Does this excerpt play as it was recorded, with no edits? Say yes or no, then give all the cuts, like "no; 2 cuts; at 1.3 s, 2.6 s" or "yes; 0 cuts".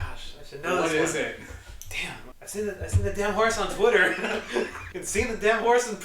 no; 2 cuts; at 2.2 s, 4.9 s